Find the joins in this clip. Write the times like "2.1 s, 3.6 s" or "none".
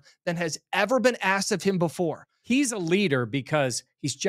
2.3 s